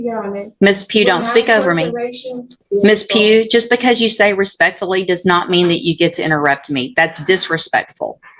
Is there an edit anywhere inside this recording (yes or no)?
yes